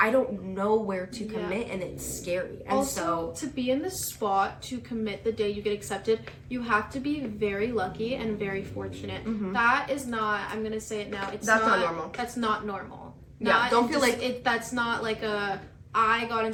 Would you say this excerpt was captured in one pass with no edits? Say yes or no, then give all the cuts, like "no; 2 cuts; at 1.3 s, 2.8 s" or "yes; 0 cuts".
yes; 0 cuts